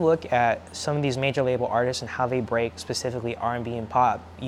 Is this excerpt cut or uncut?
uncut